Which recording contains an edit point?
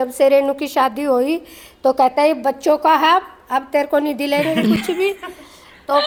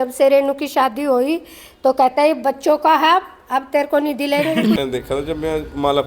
second; 1 cut; at 4.8 s

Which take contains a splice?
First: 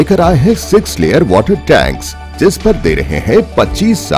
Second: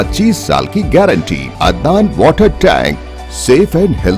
second; 1 cut; at 1.5 s

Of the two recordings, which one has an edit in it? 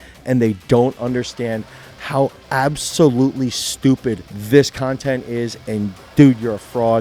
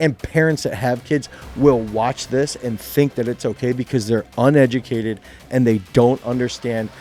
first; 1 cut; at 4.3 s

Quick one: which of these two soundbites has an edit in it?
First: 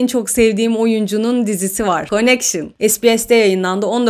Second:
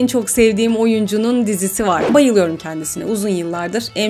second; 1 cut; at 2.0 s

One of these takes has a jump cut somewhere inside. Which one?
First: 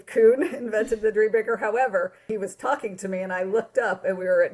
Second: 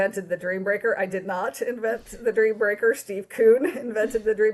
first; 1 cut; at 2.3 s

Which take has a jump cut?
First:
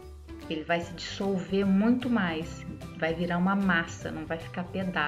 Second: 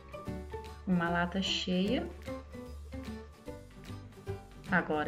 second; 3 cuts; at 0.8 s, 2.1 s, 4.0 s

